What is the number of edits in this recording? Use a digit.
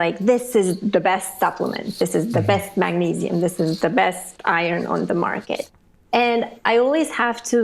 0